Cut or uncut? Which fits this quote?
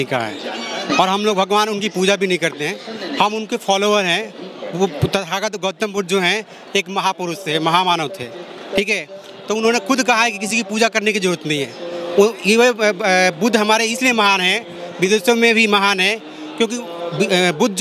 uncut